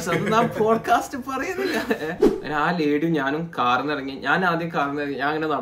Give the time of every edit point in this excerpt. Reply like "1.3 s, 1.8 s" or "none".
2.2 s